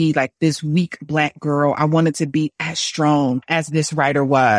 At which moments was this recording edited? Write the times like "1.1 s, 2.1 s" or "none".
3.4 s